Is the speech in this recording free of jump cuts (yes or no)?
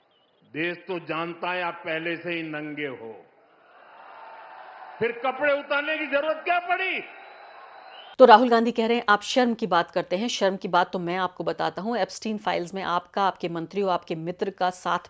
yes